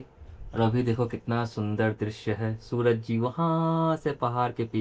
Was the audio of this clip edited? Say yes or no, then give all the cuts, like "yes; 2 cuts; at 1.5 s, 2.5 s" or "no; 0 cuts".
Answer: no; 0 cuts